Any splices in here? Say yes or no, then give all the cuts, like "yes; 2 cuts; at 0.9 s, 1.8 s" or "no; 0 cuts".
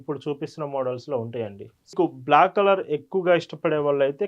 yes; 1 cut; at 1.9 s